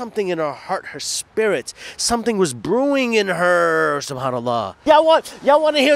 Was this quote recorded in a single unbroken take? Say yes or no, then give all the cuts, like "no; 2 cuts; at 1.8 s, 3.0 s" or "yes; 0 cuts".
no; 1 cut; at 4.8 s